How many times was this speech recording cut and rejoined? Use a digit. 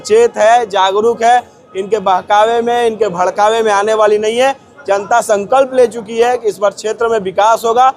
0